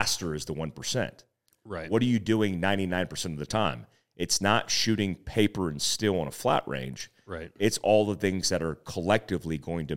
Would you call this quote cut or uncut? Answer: uncut